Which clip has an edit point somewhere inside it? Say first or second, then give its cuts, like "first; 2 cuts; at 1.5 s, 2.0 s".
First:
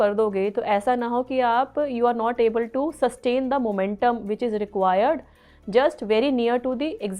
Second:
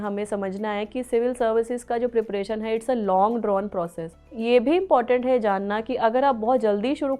second; 1 cut; at 4.4 s